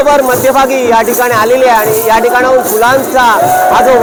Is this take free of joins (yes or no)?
yes